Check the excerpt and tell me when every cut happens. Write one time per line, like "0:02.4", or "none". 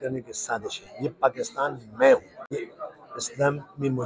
0:02.4